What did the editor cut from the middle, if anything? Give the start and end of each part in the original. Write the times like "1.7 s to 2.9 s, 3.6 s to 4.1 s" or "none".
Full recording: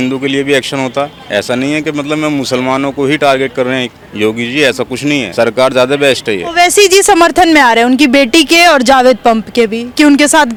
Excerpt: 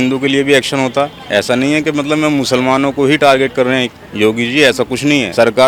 none